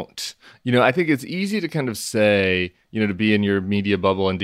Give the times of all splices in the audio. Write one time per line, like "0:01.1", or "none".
none